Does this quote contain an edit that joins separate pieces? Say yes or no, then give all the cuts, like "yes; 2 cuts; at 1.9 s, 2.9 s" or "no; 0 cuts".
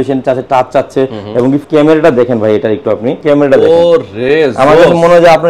yes; 2 cuts; at 1.6 s, 3.2 s